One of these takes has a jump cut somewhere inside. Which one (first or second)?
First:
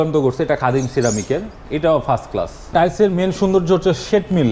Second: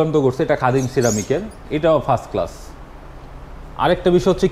first